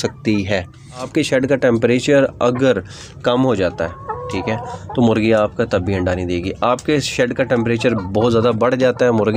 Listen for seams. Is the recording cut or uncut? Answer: cut